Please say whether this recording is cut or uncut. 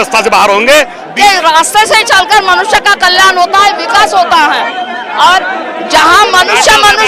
cut